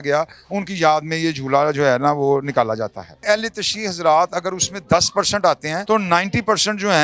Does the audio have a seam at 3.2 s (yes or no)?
yes